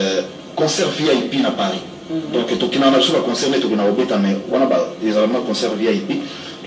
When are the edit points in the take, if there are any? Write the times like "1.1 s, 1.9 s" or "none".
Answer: none